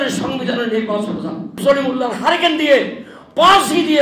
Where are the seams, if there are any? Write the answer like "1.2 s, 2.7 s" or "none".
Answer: 1.5 s